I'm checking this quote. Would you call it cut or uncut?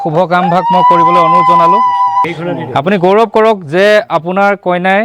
cut